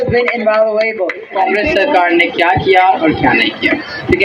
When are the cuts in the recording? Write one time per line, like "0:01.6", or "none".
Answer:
0:01.2